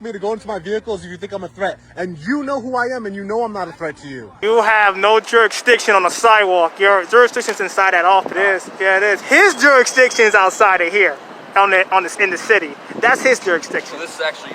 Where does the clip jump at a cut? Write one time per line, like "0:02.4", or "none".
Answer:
0:04.3
0:08.3